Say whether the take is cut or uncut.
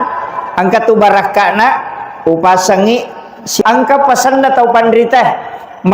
cut